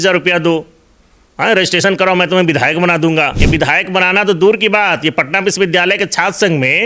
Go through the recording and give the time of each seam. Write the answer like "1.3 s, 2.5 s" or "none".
3.4 s